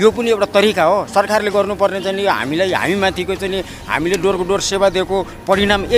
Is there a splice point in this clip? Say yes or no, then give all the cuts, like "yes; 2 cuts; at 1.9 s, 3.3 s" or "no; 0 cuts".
no; 0 cuts